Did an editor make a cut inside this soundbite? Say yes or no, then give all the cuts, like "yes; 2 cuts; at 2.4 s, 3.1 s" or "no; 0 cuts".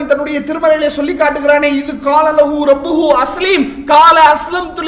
no; 0 cuts